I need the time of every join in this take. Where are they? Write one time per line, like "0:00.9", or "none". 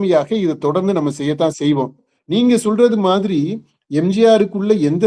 0:02.1